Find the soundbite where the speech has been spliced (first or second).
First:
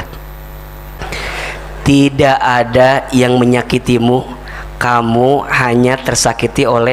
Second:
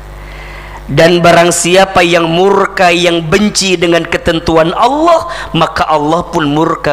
first